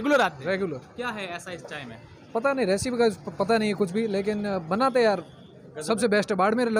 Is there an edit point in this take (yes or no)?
no